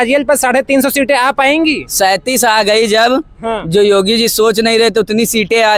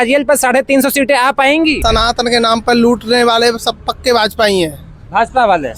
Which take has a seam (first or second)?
second